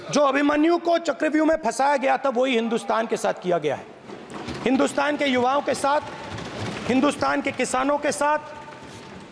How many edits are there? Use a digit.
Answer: 0